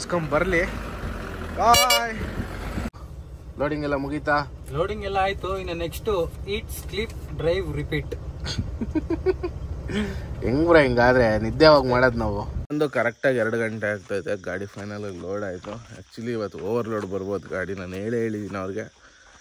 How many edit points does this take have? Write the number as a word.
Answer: two